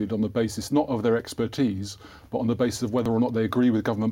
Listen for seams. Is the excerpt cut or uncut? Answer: cut